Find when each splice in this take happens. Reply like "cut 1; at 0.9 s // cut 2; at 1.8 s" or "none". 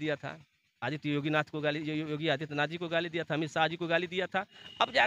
none

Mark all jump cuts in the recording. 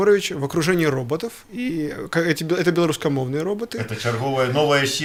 none

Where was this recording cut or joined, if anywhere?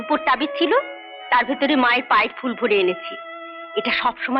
none

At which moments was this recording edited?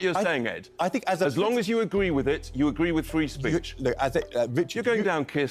cut 1; at 4.5 s

